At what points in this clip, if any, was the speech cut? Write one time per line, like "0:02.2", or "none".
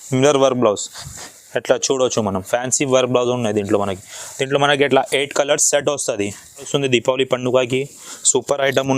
0:06.7